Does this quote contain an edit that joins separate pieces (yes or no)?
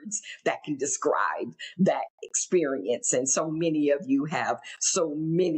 no